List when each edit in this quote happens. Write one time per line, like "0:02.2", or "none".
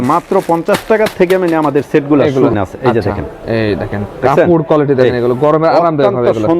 0:02.5